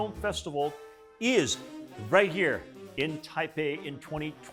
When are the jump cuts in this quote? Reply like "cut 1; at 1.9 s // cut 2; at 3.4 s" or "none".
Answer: none